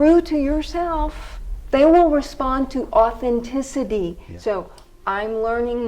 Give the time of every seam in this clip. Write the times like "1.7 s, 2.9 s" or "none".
4.3 s